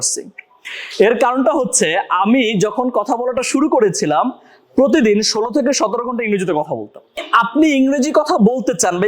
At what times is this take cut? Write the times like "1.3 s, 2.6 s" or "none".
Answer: 7.2 s